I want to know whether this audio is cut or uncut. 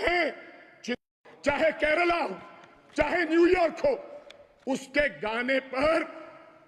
cut